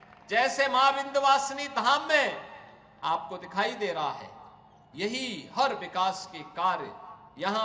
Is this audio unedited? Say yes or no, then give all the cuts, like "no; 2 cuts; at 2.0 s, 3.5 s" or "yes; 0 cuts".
yes; 0 cuts